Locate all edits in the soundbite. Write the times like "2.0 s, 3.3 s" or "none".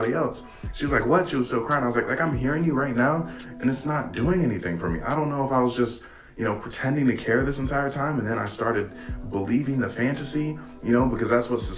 none